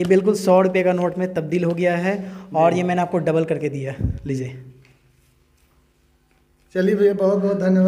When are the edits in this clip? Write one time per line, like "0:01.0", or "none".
none